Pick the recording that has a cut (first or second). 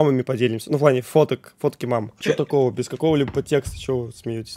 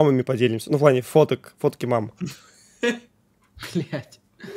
first